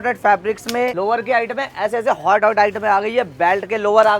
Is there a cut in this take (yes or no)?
yes